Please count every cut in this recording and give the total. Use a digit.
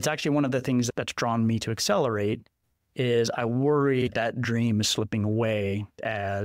0